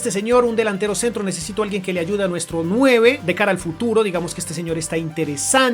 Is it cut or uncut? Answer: uncut